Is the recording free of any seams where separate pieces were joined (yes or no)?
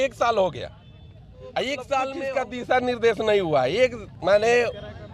no